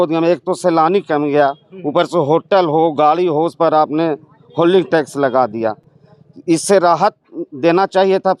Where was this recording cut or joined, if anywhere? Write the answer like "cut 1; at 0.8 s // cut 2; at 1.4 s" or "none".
none